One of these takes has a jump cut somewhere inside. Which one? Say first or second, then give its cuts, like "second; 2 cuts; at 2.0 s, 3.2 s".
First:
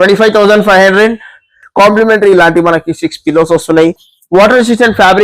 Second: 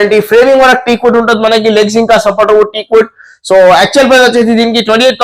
first; 1 cut; at 1.5 s